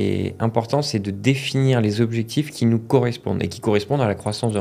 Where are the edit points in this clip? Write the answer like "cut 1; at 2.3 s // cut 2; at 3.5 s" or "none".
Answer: none